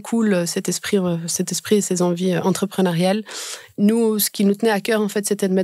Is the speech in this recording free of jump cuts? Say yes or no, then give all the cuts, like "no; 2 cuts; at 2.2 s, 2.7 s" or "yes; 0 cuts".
no; 1 cut; at 3.6 s